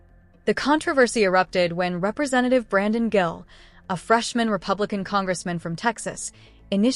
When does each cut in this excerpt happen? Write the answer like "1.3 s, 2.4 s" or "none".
1.6 s